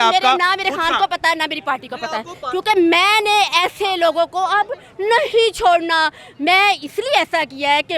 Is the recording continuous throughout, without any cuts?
yes; 0 cuts

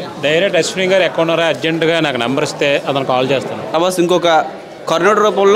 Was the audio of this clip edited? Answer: yes; 1 cut; at 3.7 s

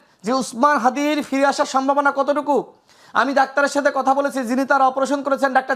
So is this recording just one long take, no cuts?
yes; 0 cuts

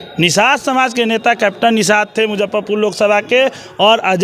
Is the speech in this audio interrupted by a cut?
no; 0 cuts

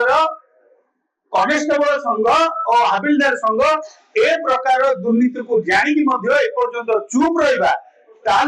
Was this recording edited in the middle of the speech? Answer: no; 0 cuts

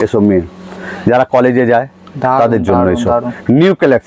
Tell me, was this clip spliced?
no; 0 cuts

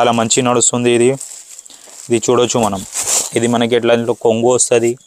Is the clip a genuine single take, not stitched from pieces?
yes; 0 cuts

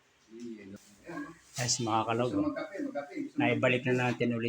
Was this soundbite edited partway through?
yes; 1 cut; at 0.9 s

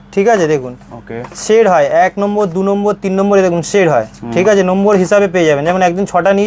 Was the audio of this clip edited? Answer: no; 0 cuts

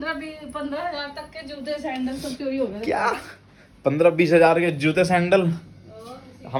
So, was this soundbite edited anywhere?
no; 0 cuts

